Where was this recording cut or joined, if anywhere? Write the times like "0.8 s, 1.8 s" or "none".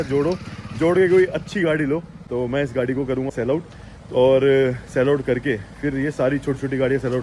2.2 s, 3.3 s